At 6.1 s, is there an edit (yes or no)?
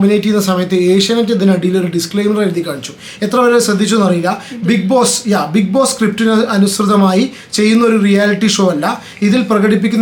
no